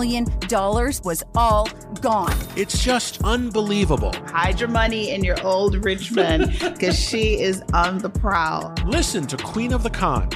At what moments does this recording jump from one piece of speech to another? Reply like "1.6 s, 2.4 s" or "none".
none